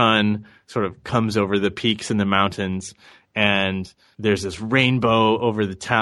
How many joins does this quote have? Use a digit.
1